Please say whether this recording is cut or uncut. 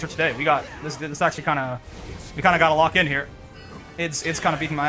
uncut